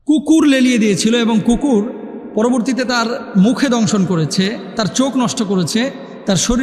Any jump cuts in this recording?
no; 0 cuts

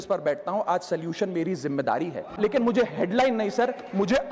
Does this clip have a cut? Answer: yes; 1 cut; at 2.3 s

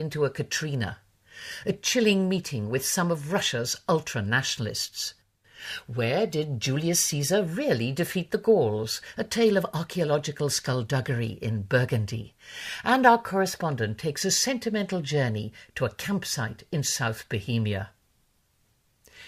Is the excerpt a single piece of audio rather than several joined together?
no; 1 cut; at 18.1 s

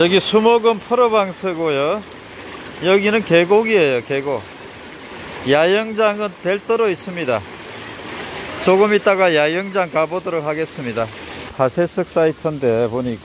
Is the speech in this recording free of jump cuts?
no; 1 cut; at 11.5 s

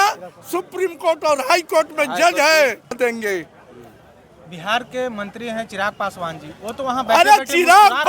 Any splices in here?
yes; 1 cut; at 3.0 s

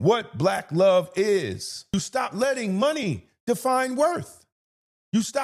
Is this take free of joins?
no; 1 cut; at 1.9 s

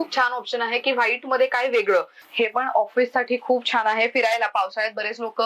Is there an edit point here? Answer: yes; 1 cut; at 2.2 s

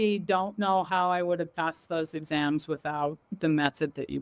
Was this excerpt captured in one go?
yes; 0 cuts

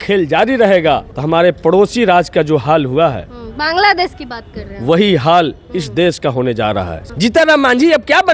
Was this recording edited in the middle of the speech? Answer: yes; 2 cuts; at 1.1 s, 7.0 s

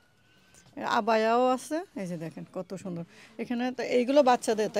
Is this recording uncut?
yes; 0 cuts

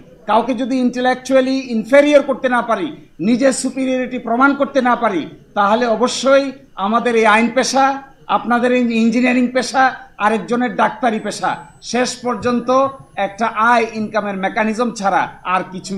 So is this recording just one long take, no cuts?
yes; 0 cuts

